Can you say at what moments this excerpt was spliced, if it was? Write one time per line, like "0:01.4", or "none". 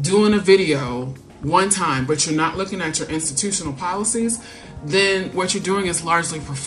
none